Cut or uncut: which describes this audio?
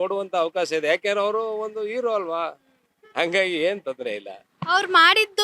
uncut